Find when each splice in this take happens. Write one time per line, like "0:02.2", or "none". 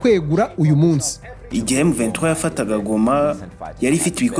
0:01.4